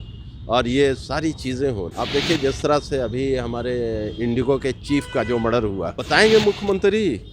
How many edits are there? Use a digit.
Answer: 2